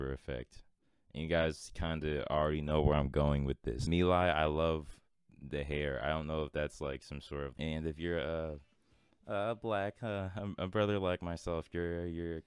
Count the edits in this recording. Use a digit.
2